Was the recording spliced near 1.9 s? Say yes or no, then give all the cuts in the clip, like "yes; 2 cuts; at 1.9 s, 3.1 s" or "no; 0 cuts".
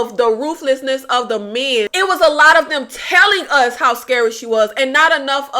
yes; 1 cut; at 1.9 s